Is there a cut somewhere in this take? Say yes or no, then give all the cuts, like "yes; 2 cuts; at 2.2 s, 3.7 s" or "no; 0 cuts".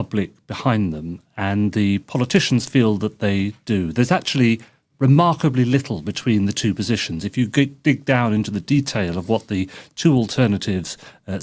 no; 0 cuts